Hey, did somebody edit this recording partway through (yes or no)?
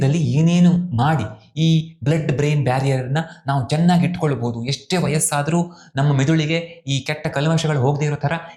no